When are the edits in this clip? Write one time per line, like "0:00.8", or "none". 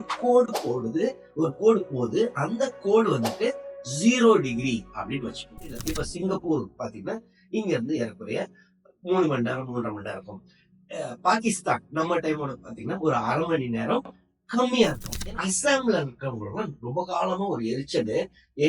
0:05.8
0:15.1